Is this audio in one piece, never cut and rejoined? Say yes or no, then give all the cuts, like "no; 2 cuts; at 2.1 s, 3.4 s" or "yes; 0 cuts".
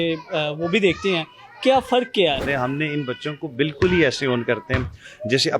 no; 1 cut; at 2.5 s